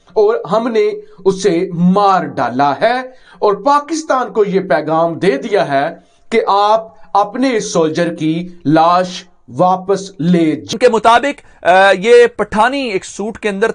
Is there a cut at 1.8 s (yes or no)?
no